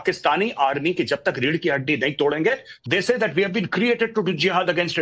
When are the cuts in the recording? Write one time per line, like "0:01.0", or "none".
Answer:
0:02.7